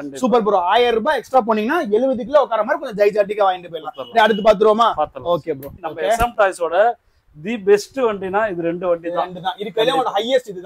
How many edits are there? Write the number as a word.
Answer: one